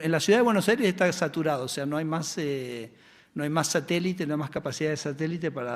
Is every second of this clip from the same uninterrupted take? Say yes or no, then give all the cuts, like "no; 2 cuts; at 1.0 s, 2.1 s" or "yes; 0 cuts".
yes; 0 cuts